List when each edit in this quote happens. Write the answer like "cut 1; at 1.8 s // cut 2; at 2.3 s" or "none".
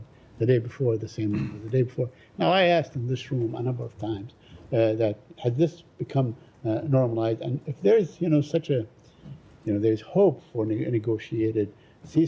none